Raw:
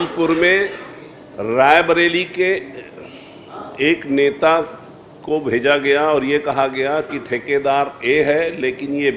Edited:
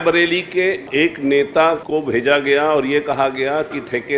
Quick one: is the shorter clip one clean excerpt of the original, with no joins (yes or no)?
no